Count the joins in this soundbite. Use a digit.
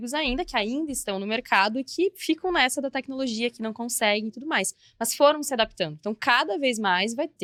0